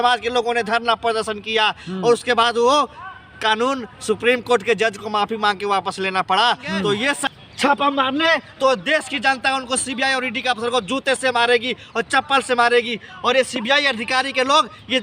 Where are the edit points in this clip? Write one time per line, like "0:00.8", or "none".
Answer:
0:07.2